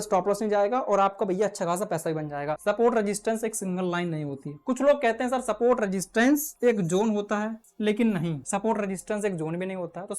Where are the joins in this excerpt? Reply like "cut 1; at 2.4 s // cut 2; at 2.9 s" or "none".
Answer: cut 1; at 2.6 s // cut 2; at 6.5 s // cut 3; at 7.6 s // cut 4; at 8.4 s